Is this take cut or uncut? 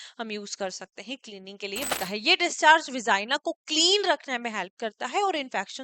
cut